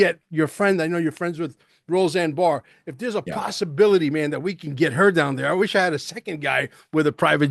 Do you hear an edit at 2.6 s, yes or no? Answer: no